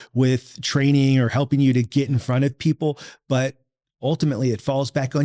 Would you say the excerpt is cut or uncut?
uncut